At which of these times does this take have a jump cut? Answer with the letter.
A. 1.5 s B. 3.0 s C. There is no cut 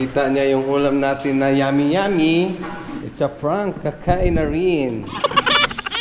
C